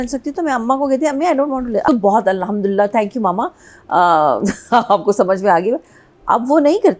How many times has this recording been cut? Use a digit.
1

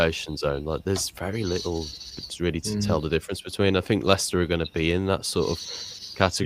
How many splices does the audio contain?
0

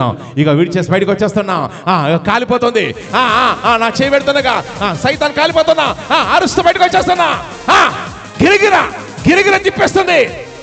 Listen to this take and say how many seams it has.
0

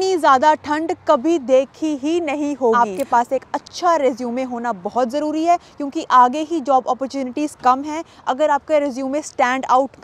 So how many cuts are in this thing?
1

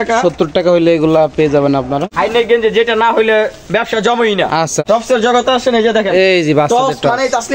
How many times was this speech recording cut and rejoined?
2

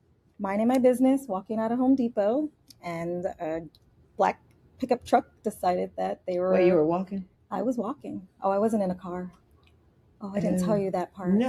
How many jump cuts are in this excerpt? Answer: 0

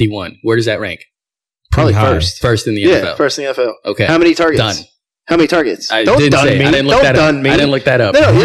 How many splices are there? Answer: 0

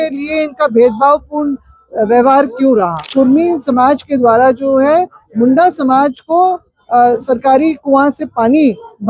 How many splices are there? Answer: 1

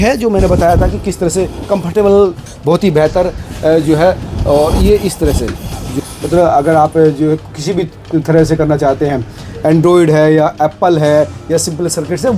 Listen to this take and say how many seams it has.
2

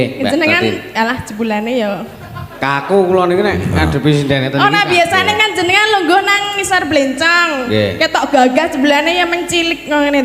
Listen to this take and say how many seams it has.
0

